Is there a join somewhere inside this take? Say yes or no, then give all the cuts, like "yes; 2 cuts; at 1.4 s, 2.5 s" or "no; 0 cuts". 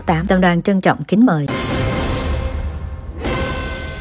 yes; 1 cut; at 1.5 s